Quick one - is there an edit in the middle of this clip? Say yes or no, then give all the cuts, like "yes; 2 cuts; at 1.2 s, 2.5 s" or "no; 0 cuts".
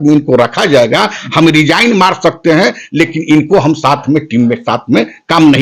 no; 0 cuts